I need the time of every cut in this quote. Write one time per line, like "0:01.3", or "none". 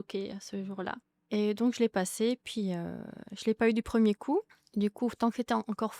0:01.1
0:04.6

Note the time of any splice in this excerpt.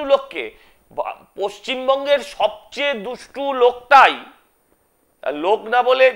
none

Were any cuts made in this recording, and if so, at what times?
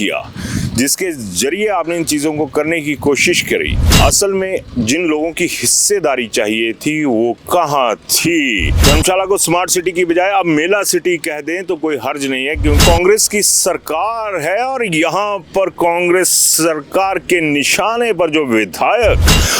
0:03.9
0:08.8
0:12.8

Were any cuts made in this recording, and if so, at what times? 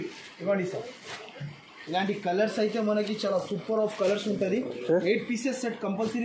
none

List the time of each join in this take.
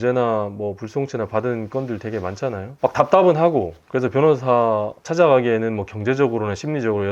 0:02.7
0:05.0

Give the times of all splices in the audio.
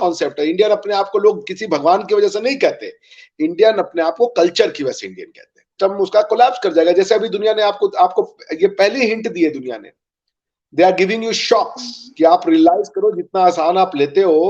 0:05.8

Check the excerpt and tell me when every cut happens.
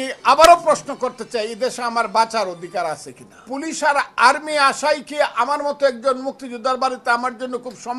0:03.4

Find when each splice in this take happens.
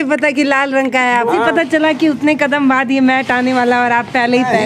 0:01.3

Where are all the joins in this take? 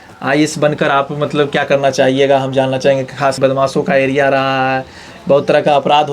0:03.4

